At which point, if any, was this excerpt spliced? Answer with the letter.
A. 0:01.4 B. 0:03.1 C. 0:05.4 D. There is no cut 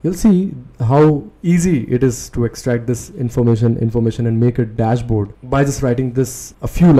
D